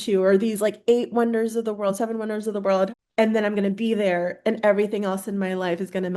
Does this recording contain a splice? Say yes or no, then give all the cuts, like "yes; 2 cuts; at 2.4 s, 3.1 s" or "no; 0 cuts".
yes; 1 cut; at 2.9 s